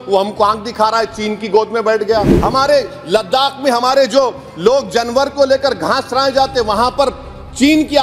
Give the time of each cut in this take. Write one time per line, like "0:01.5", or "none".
0:02.4